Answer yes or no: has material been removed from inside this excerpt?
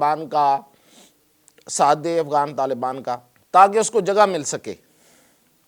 yes